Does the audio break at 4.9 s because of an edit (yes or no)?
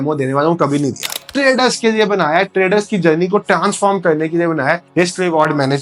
yes